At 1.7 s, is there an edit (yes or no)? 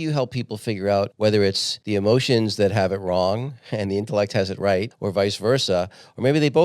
yes